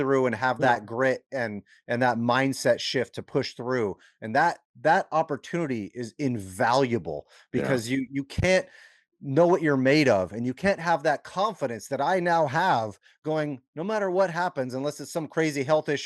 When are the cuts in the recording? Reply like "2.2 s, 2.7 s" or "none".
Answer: none